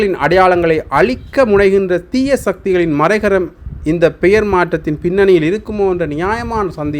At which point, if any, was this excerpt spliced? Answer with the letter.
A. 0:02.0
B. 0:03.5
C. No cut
C